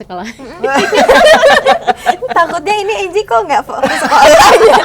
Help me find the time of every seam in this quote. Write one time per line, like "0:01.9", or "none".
none